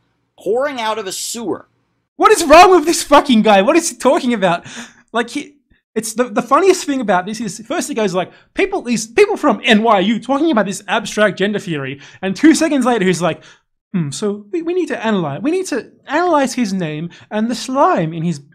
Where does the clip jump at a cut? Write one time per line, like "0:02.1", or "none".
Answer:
none

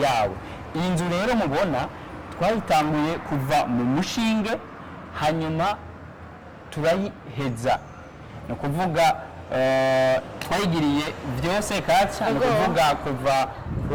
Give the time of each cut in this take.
none

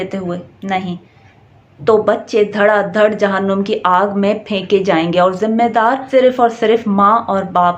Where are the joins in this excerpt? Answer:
0:01.7

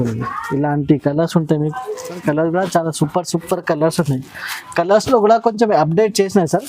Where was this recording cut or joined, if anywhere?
0:02.2

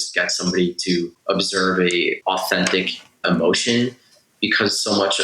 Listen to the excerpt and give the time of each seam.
0:01.1
0:02.2
0:03.2

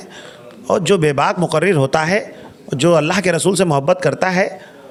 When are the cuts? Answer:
none

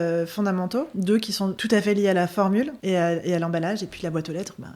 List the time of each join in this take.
0:00.9
0:02.8

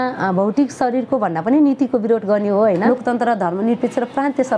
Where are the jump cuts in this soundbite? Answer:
0:02.8

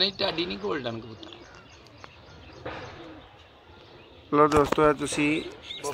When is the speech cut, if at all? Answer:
none

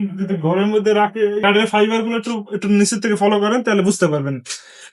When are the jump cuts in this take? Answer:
0:01.4

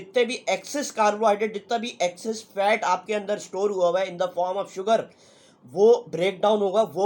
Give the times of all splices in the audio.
none

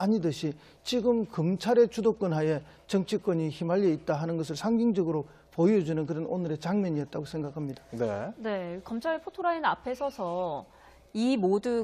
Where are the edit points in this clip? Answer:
none

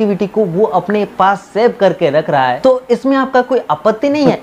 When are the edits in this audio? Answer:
0:02.6

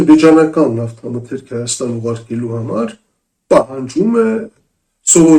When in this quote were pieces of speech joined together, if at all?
none

